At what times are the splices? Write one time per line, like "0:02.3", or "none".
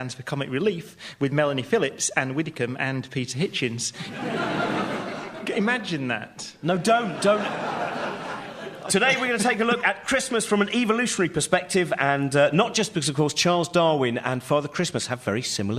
0:07.3